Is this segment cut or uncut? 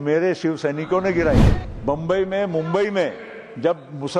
cut